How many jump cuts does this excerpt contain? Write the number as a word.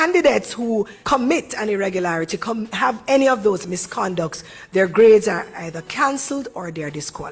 one